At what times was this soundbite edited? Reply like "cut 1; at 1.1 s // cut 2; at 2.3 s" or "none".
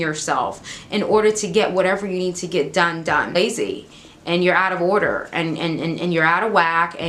cut 1; at 3.3 s